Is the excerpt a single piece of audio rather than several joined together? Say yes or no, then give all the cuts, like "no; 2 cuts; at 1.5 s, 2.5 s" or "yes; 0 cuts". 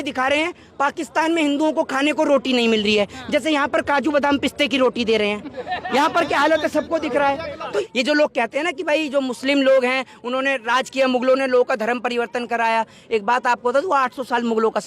no; 1 cut; at 7.8 s